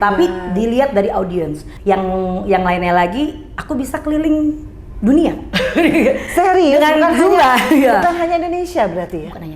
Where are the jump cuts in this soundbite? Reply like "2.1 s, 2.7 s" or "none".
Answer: 1.7 s